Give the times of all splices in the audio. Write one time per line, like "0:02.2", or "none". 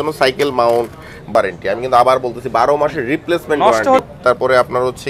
0:01.3
0:04.0